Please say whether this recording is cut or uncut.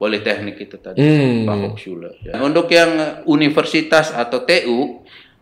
cut